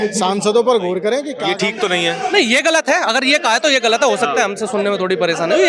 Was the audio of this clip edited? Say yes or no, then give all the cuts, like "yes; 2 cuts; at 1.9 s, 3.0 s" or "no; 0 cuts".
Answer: yes; 1 cut; at 1.4 s